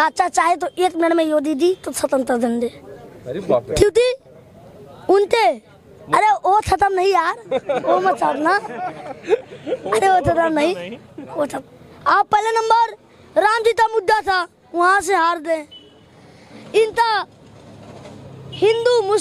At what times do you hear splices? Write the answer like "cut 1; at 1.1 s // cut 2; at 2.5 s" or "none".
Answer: cut 1; at 11.6 s